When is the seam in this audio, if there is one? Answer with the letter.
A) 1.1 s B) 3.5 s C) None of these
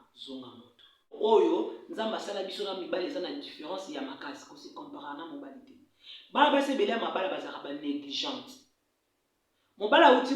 A